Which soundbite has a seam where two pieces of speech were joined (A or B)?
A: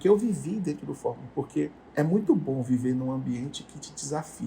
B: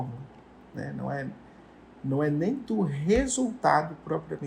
A